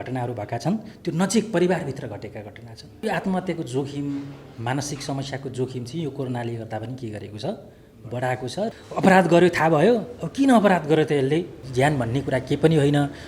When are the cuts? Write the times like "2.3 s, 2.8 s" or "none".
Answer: 3.0 s, 8.7 s, 11.6 s